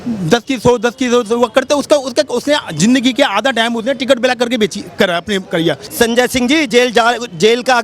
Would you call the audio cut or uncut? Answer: cut